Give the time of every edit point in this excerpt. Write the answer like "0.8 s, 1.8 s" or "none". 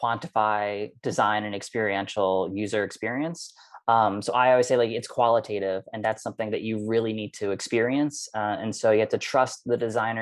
none